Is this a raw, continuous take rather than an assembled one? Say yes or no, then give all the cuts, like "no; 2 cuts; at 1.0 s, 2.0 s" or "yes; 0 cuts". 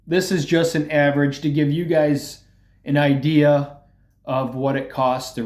yes; 0 cuts